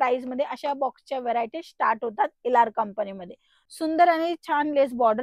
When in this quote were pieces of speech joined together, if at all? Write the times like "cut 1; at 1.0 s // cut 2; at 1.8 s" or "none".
cut 1; at 3.6 s

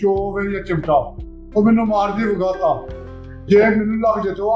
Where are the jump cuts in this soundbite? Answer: none

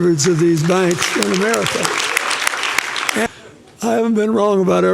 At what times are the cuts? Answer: cut 1; at 3.3 s

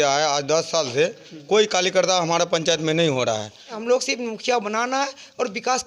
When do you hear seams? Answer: cut 1; at 3.8 s

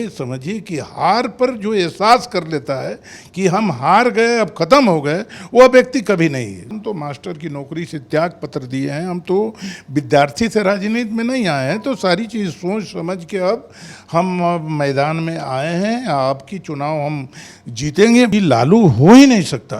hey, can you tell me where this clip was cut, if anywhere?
cut 1; at 6.7 s // cut 2; at 18.3 s

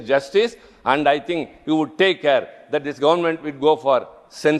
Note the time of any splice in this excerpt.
none

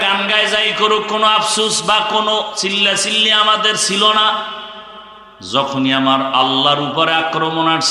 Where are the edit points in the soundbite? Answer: none

